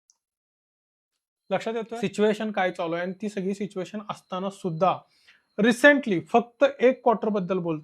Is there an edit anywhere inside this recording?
yes; 1 cut; at 1.9 s

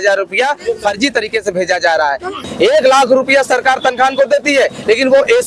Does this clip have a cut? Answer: yes; 1 cut; at 2.4 s

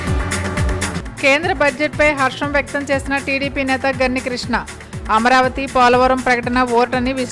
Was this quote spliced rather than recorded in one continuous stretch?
yes; 1 cut; at 0.9 s

